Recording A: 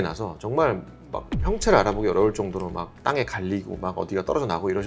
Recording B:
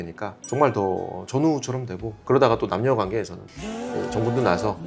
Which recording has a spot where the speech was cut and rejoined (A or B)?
B